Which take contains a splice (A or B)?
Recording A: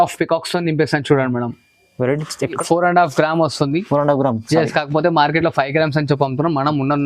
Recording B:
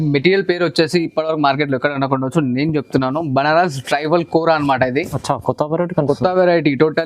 A